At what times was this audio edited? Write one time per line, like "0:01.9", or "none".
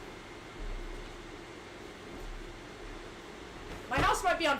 0:02.5